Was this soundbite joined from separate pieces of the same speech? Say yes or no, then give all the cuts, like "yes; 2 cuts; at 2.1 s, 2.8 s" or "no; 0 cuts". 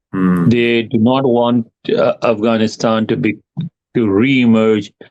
no; 0 cuts